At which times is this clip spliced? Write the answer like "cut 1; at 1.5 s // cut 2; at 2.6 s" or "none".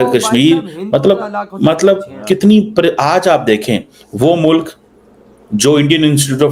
none